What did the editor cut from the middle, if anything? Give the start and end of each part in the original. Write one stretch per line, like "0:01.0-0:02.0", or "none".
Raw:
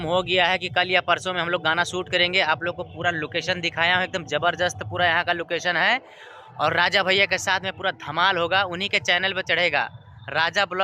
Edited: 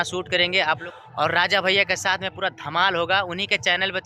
0:02.7-0:06.4